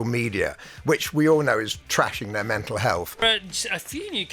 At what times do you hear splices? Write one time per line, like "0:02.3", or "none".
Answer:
0:03.2